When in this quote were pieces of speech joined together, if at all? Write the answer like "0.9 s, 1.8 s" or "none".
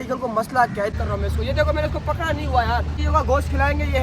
0.9 s, 3.0 s